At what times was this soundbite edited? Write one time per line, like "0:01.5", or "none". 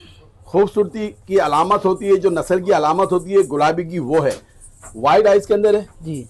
none